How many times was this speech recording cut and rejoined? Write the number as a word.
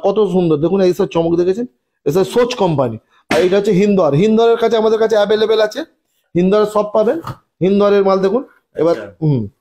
zero